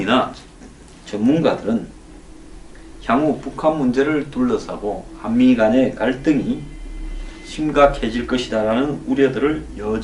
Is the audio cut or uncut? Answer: uncut